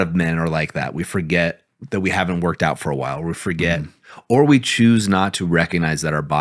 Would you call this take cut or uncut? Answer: cut